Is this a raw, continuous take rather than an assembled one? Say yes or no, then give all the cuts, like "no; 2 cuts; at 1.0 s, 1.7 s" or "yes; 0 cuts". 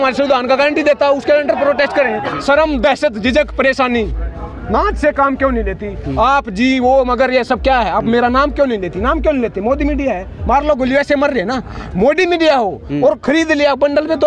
no; 1 cut; at 2.3 s